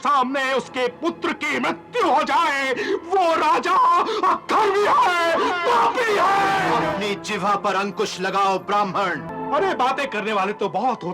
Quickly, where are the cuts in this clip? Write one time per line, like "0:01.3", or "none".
0:06.8
0:09.3

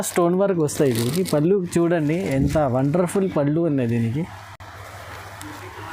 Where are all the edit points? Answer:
none

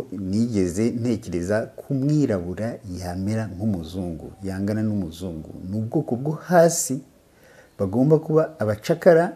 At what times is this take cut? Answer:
none

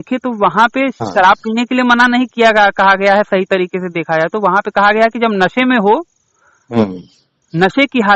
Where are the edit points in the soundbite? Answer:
0:01.0

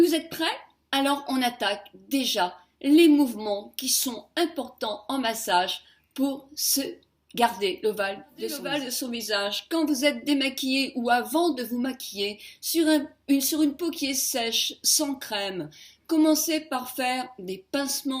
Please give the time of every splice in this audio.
0:08.3

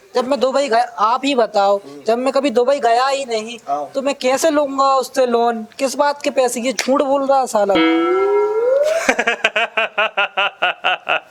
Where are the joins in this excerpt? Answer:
none

